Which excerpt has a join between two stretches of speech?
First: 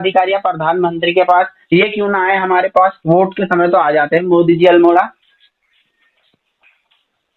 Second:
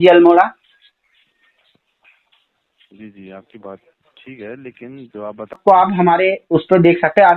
second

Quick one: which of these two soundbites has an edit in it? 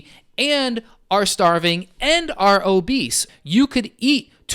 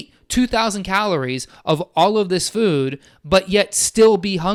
first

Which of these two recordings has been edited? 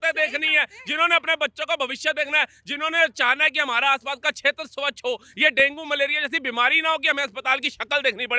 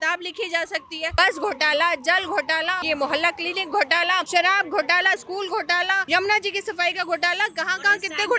second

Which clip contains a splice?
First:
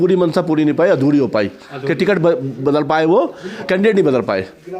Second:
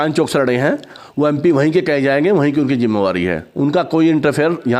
first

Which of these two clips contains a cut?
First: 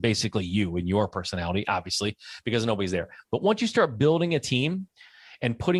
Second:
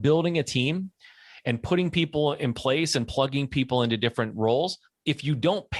second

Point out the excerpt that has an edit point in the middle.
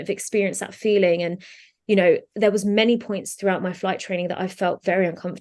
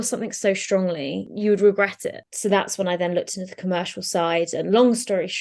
second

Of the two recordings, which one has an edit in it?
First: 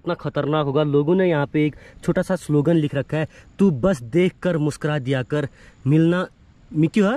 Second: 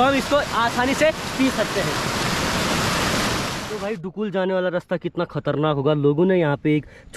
second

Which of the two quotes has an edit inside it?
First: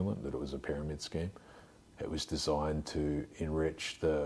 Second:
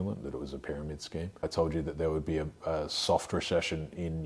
second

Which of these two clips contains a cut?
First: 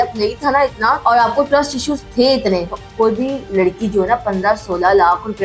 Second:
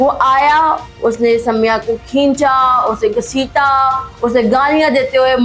first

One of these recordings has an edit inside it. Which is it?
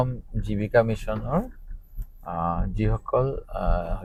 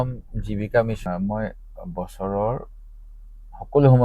second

